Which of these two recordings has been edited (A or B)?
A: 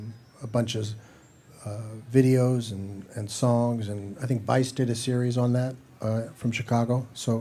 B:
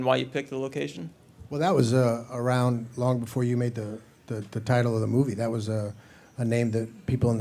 B